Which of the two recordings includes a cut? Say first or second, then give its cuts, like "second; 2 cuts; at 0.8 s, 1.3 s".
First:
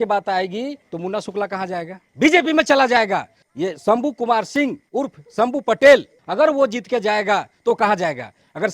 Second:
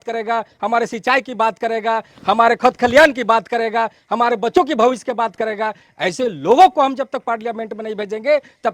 first; 5 cuts; at 0.8 s, 2.0 s, 3.4 s, 4.8 s, 6.2 s